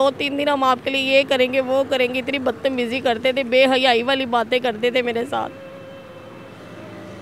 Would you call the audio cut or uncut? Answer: uncut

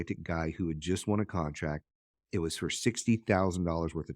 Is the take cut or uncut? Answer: uncut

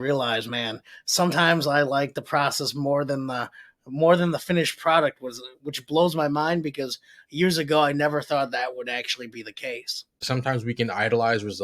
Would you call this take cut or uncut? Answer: cut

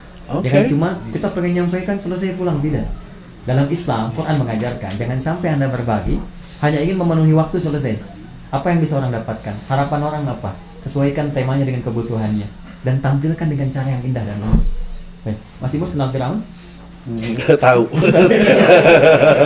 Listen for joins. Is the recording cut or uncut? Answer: uncut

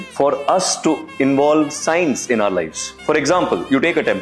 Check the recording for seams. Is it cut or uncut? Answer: cut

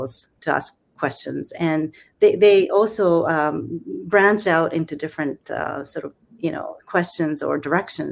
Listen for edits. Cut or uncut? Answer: uncut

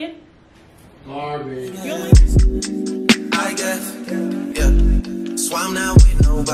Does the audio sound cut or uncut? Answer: cut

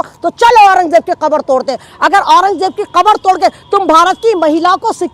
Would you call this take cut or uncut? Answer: uncut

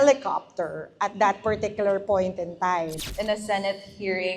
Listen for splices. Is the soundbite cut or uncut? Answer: cut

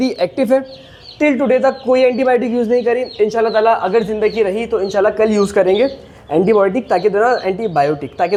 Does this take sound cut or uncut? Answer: uncut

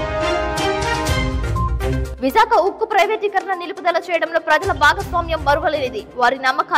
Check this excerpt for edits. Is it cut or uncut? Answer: cut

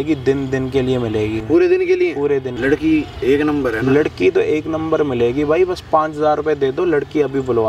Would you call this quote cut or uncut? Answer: cut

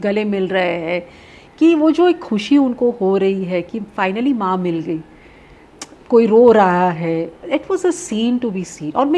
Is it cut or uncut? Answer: uncut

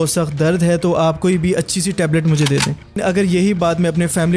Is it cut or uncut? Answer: cut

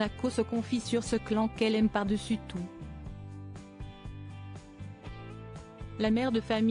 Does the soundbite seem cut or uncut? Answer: cut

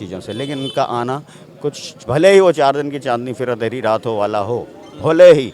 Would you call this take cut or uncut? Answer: uncut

